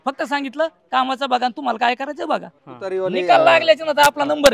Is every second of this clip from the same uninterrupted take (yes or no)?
no